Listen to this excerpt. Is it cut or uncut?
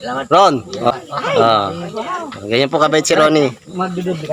cut